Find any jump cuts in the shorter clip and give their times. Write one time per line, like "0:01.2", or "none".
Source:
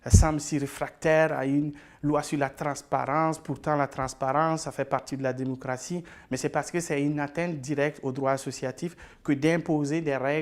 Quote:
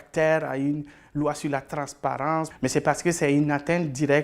0:02.5